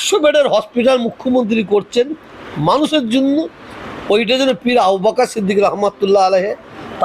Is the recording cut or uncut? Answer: uncut